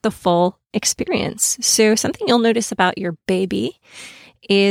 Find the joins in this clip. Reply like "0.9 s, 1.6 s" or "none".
none